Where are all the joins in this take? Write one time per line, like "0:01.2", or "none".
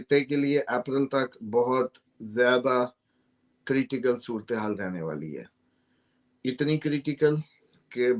none